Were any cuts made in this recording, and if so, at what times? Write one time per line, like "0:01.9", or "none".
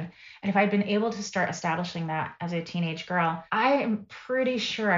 0:03.4